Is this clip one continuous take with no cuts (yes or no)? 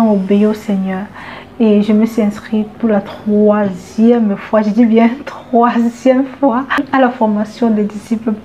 no